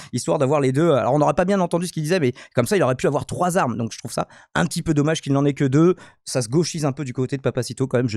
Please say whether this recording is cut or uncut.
uncut